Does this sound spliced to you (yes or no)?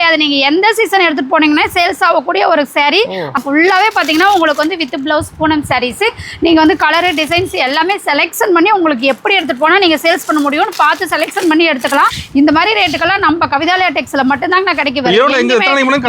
yes